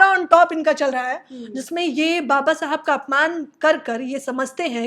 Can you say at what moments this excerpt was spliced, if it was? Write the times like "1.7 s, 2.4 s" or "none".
none

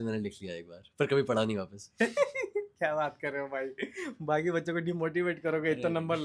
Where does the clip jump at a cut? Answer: none

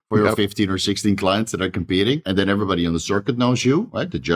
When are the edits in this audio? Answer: 2.2 s

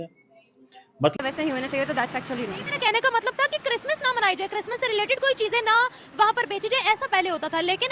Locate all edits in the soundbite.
1.1 s

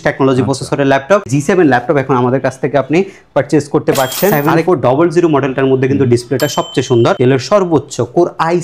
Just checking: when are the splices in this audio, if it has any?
1.3 s, 4.5 s, 7.2 s

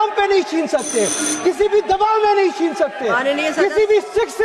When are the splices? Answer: none

